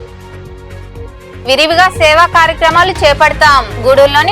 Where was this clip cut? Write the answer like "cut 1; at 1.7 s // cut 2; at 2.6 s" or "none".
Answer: cut 1; at 1.1 s